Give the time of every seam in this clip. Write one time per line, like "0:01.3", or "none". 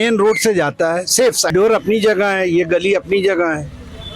0:01.5